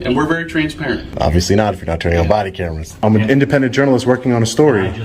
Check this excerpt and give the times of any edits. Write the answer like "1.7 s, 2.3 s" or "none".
1.1 s, 3.0 s